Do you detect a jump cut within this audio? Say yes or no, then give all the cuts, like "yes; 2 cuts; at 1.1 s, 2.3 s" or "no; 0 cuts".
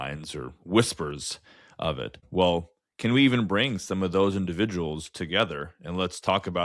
yes; 1 cut; at 2.2 s